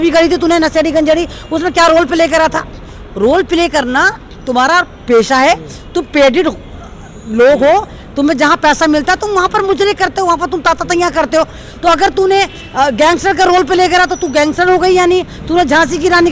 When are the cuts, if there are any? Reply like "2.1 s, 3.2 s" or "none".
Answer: none